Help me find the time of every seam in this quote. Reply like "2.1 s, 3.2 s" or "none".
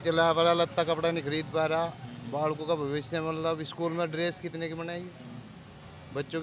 none